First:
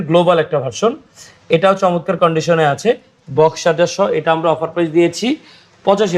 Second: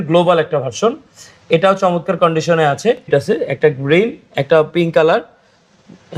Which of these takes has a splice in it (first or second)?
second